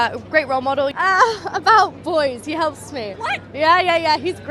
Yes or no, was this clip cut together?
yes